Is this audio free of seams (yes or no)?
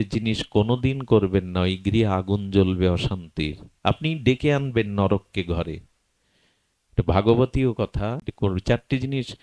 no